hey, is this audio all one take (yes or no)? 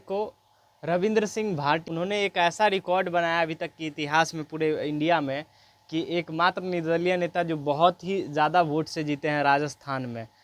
no